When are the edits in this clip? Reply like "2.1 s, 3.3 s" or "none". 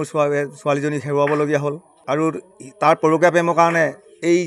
1.9 s